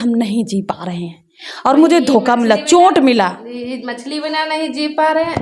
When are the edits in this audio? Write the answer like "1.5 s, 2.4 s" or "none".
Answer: none